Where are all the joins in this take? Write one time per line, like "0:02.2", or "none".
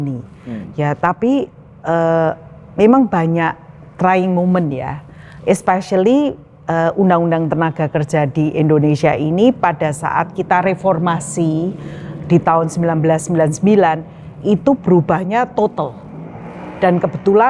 none